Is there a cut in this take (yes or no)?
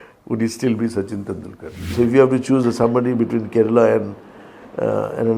yes